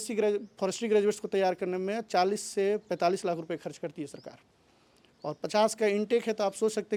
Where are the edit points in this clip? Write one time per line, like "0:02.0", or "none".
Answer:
none